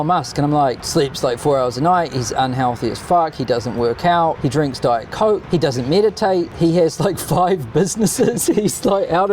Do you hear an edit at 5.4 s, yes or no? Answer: yes